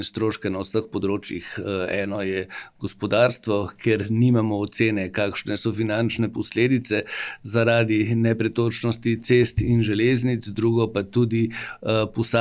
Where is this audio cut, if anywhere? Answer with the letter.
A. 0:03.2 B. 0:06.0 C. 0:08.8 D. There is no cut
D